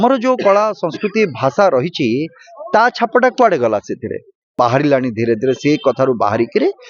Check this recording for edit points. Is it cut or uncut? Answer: cut